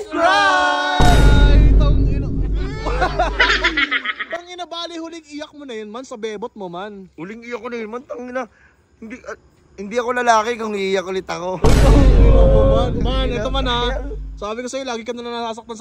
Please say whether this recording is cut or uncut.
uncut